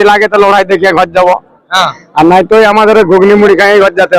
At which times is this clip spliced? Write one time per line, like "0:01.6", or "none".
none